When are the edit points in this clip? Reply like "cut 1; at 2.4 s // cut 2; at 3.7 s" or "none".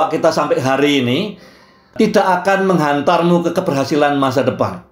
cut 1; at 1.9 s